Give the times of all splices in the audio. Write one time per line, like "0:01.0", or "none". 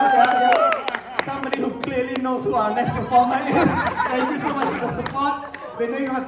none